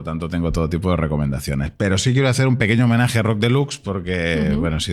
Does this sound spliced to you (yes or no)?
no